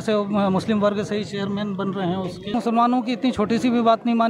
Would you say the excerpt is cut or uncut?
cut